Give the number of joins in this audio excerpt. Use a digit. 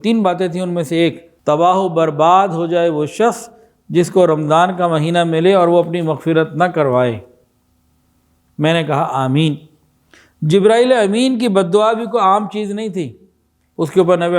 1